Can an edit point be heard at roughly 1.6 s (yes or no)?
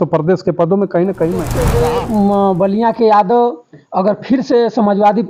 yes